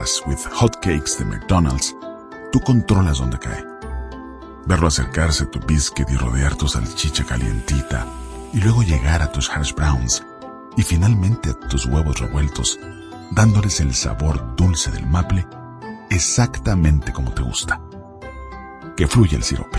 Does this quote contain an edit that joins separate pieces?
no; 0 cuts

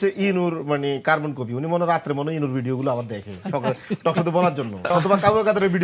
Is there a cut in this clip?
yes; 1 cut; at 4.9 s

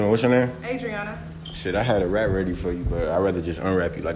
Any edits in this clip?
no; 0 cuts

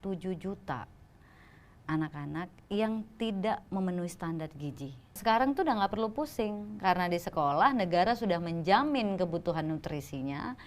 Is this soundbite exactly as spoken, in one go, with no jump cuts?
no; 1 cut; at 5.2 s

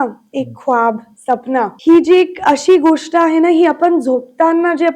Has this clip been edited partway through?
yes; 1 cut; at 1.8 s

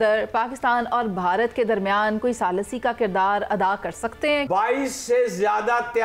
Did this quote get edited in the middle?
yes; 1 cut; at 4.5 s

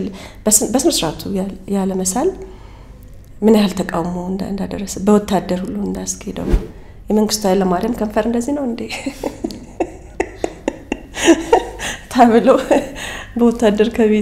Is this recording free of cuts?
yes; 0 cuts

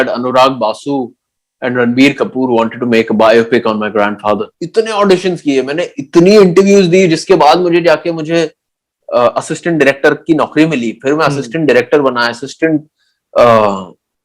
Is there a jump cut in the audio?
yes; 1 cut; at 4.6 s

